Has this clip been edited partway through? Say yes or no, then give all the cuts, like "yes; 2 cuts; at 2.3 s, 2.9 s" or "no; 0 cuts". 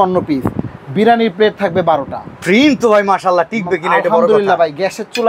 no; 0 cuts